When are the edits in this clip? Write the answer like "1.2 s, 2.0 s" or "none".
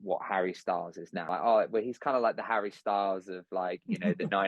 1.3 s